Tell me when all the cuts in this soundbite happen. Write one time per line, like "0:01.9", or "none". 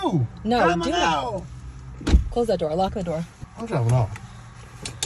0:03.4